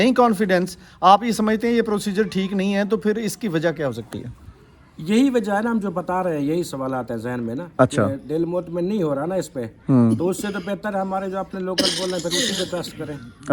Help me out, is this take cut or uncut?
uncut